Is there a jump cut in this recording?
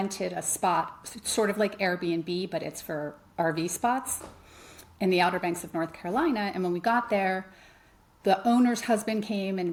no; 0 cuts

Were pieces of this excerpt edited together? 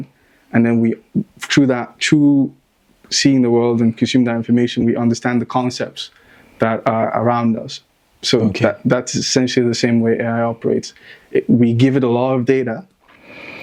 no; 0 cuts

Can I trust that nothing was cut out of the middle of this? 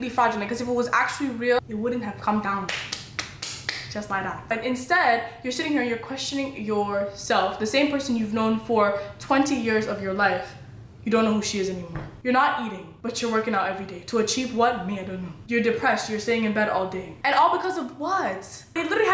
no; 2 cuts; at 1.6 s, 4.5 s

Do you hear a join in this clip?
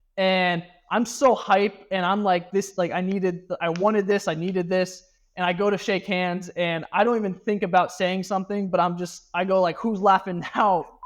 no; 0 cuts

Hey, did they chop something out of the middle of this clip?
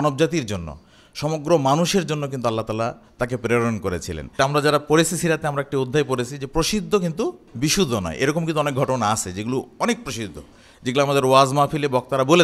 yes; 2 cuts; at 4.2 s, 7.4 s

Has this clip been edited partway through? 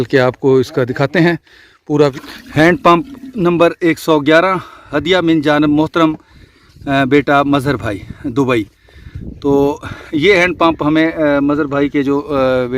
yes; 1 cut; at 2.1 s

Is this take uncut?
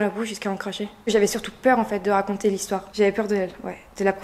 no; 2 cuts; at 1.0 s, 2.8 s

